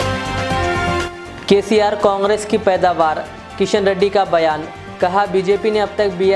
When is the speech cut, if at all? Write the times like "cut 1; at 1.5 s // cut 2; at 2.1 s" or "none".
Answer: cut 1; at 1.0 s